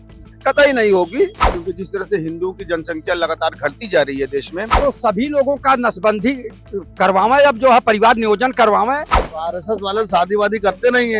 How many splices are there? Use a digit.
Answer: 3